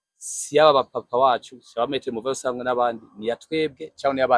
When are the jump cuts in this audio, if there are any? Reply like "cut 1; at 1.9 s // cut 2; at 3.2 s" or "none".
none